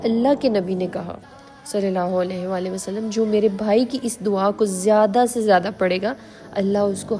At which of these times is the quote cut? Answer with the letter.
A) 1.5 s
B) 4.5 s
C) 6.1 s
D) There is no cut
D